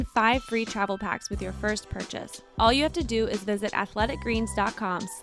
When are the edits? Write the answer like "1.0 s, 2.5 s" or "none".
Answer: 2.4 s